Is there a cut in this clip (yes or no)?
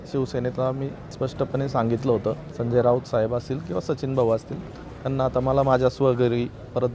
yes